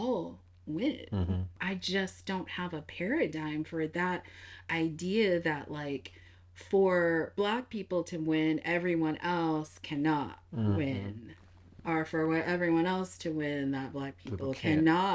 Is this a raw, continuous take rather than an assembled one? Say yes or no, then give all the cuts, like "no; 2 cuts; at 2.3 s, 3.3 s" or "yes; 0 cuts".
no; 1 cut; at 1.6 s